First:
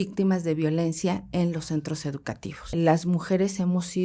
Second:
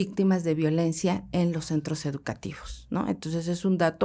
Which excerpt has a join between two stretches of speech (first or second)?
first